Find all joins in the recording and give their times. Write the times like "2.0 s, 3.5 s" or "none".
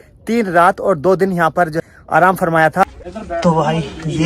1.8 s, 2.9 s